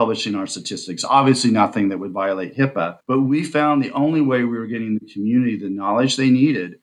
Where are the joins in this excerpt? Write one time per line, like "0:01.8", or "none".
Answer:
none